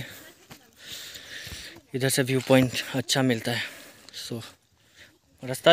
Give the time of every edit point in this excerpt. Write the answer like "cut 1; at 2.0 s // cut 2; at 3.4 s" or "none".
none

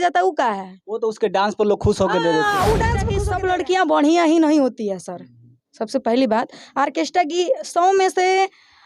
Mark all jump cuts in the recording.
cut 1; at 3.1 s

